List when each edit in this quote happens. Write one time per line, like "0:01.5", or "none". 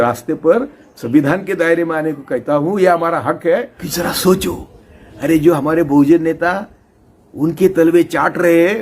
0:03.8